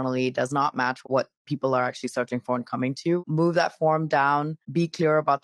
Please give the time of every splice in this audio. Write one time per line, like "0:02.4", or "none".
0:01.0
0:03.2
0:04.6